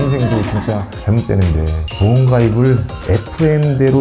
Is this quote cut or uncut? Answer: uncut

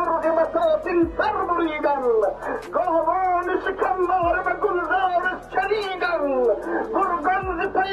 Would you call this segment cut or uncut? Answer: uncut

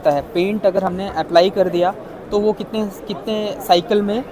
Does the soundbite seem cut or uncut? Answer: uncut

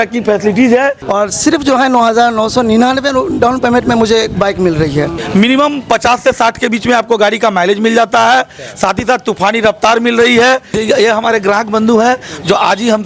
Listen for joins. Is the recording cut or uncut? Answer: cut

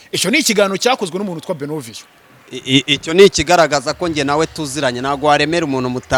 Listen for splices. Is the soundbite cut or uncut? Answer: uncut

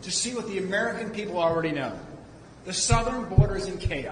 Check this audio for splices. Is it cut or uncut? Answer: uncut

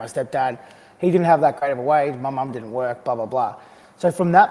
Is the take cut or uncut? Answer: uncut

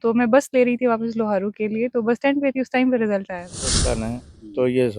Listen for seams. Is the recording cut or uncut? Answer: cut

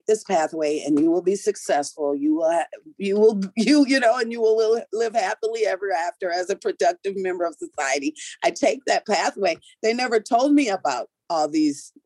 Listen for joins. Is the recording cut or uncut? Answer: uncut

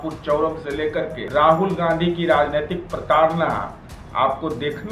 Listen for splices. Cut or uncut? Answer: cut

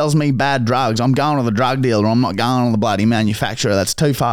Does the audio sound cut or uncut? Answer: uncut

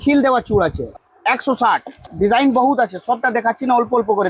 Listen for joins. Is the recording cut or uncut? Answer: cut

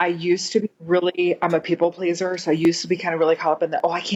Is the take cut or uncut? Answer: uncut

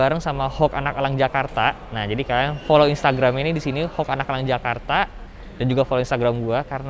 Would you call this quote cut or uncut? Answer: uncut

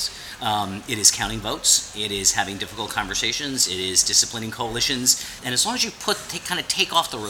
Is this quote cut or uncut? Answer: cut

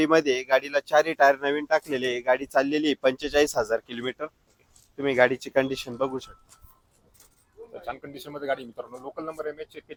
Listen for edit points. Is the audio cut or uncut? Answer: uncut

